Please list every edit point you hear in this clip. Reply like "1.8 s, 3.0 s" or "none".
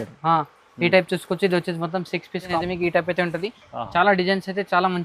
2.6 s